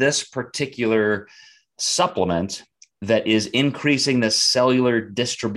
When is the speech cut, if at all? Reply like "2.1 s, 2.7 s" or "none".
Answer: none